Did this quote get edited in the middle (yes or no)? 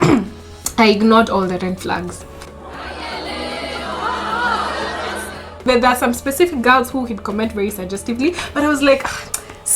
yes